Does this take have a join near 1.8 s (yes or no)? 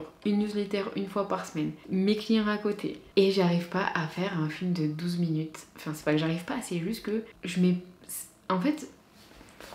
yes